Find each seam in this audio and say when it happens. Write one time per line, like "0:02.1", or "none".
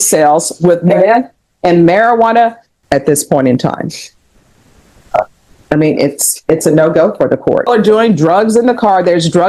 0:02.7
0:07.7

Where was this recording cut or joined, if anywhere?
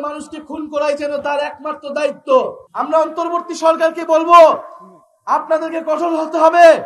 0:02.6

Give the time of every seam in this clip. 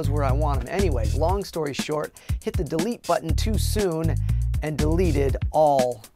0:02.6

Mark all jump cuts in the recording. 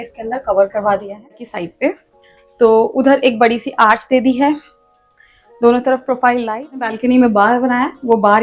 0:01.5
0:07.0

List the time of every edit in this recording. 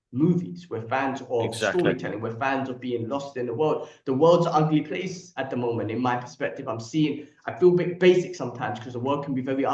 none

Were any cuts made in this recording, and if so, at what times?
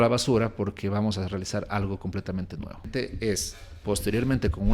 0:02.9

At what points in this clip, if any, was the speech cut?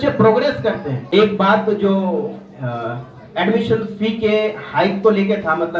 0:00.9

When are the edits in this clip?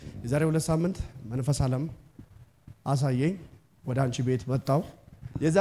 none

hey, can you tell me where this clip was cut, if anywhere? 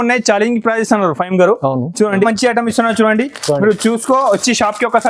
0:02.3

